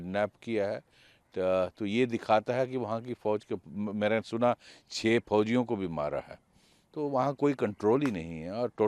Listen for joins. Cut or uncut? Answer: uncut